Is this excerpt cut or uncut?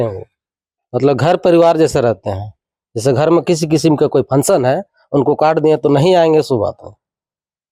uncut